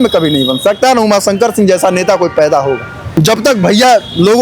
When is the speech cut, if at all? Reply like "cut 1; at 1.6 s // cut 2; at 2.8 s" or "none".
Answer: cut 1; at 3.0 s